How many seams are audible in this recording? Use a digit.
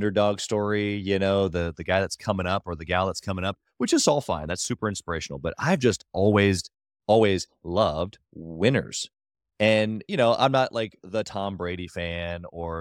0